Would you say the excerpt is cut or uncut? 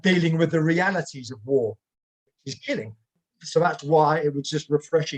cut